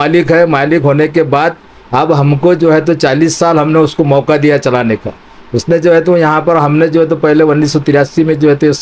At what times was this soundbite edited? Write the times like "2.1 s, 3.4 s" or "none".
none